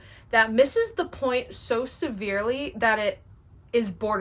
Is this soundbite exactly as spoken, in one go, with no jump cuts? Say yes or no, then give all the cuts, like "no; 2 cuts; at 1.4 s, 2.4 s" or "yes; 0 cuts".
yes; 0 cuts